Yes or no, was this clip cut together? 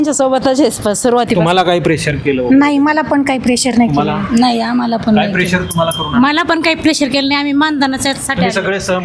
no